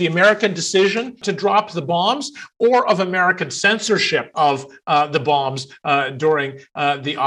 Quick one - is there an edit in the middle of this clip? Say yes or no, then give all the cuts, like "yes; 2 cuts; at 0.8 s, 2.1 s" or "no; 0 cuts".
yes; 2 cuts; at 1.2 s, 4.3 s